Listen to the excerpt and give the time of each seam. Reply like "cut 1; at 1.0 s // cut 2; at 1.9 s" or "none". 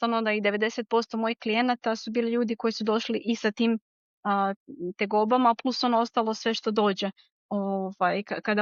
none